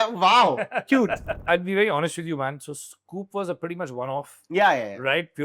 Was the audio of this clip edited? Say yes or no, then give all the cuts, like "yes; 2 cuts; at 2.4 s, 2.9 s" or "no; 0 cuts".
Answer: yes; 1 cut; at 1.4 s